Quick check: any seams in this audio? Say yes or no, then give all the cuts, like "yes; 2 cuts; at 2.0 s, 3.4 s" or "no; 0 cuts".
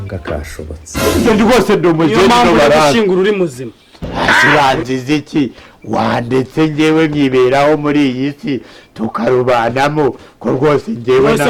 yes; 1 cut; at 0.9 s